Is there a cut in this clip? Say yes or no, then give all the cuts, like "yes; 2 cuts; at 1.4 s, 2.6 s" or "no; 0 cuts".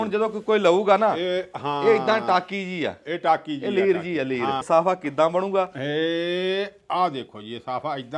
yes; 1 cut; at 4.6 s